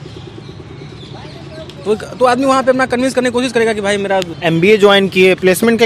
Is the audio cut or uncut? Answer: cut